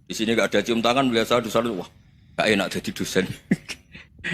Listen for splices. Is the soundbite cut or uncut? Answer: uncut